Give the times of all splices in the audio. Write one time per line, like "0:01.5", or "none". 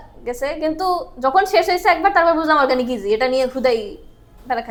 none

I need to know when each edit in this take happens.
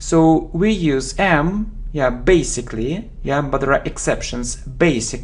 0:03.1

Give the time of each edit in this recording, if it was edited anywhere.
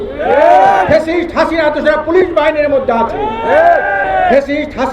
0:04.0

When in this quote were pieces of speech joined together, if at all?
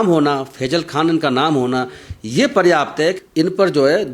0:03.2

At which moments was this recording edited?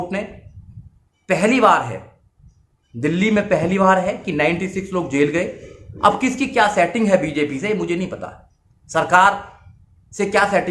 none

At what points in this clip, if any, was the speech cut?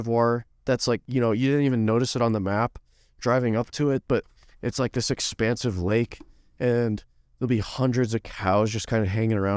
0:01.0

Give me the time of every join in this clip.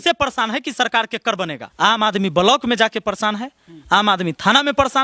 0:01.6

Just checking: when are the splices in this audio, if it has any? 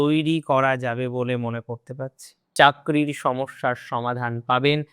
0:02.4

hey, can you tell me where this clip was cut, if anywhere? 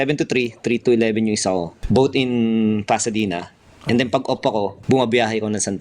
0:01.7
0:04.8

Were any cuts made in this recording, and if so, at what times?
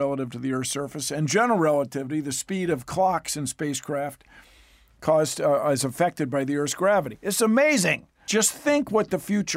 0:08.2

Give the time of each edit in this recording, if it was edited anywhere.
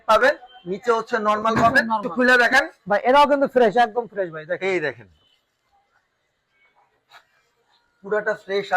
0:02.1

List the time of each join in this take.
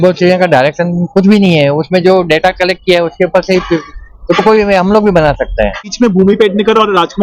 0:05.9

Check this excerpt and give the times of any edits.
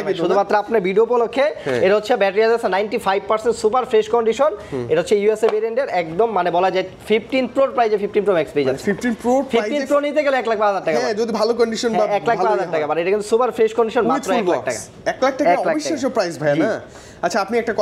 none

